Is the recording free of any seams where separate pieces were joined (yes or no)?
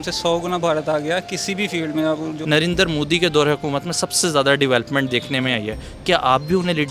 no